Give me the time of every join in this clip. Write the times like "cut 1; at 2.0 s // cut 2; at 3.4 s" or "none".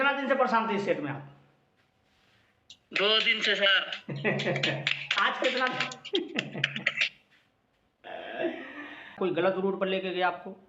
cut 1; at 9.2 s